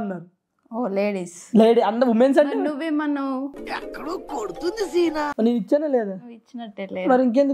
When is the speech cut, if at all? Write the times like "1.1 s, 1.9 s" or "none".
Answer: 5.3 s

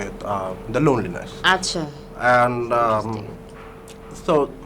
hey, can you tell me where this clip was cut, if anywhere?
none

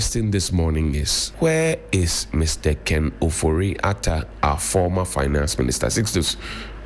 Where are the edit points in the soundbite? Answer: 1.2 s

